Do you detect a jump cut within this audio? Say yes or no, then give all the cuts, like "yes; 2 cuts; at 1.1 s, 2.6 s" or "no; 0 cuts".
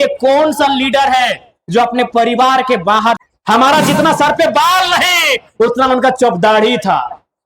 yes; 1 cut; at 3.2 s